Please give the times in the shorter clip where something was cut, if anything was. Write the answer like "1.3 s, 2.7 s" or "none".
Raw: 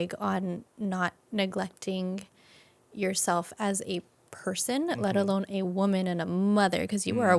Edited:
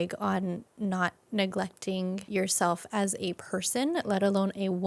2.2 s, 3.4 s